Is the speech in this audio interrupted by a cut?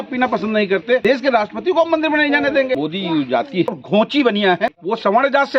yes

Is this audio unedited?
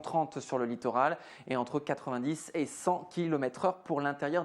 no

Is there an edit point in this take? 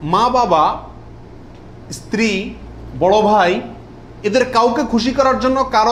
no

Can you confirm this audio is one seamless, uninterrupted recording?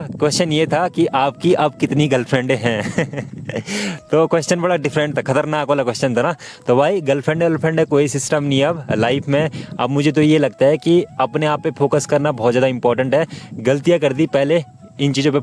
yes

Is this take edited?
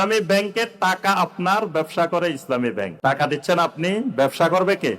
yes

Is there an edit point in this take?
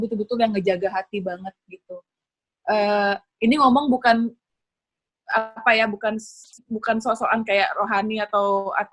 no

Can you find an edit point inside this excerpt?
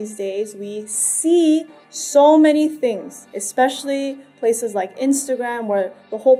no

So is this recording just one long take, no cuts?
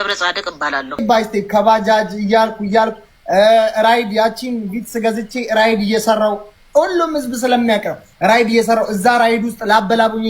no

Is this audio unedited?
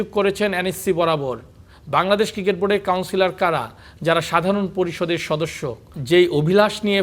no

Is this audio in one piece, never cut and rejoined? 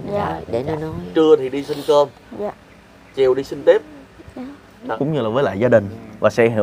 no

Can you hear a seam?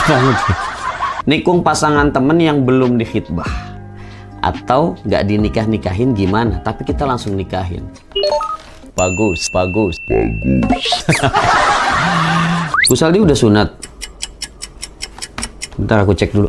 yes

